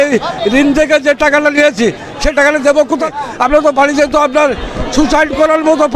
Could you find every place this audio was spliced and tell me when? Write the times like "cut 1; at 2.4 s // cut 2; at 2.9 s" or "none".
cut 1; at 3.1 s